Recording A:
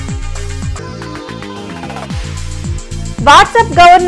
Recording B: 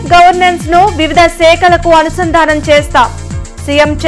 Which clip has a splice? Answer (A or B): A